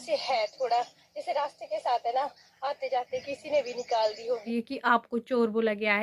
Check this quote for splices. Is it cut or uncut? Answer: cut